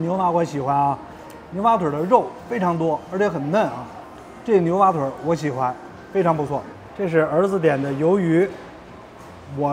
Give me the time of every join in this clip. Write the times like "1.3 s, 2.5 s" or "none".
none